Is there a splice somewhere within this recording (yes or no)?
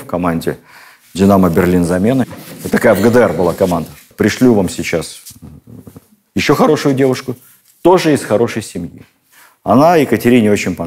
no